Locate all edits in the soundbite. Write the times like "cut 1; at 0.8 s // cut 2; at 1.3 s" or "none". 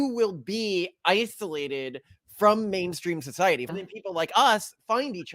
cut 1; at 3.7 s